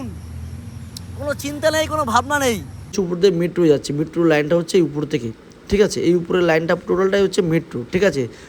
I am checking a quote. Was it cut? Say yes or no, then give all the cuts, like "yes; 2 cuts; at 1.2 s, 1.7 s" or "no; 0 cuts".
yes; 1 cut; at 2.9 s